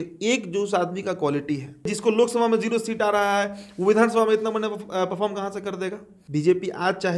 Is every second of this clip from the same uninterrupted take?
no; 2 cuts; at 1.9 s, 6.1 s

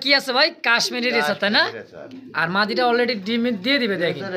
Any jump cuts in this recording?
no; 0 cuts

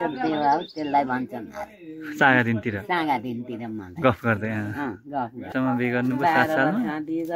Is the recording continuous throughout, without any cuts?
no; 1 cut; at 5.5 s

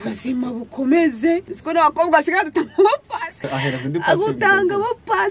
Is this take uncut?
no; 2 cuts; at 1.5 s, 3.5 s

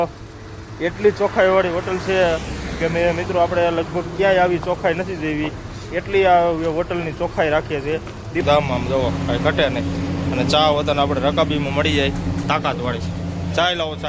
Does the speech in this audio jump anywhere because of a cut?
yes; 1 cut; at 8.4 s

